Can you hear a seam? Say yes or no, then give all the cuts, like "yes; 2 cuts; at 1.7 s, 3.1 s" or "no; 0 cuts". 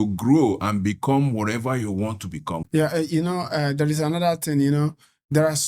yes; 1 cut; at 2.6 s